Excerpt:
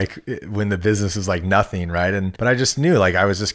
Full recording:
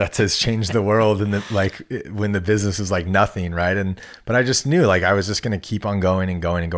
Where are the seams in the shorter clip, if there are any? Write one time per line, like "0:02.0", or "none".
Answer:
0:02.3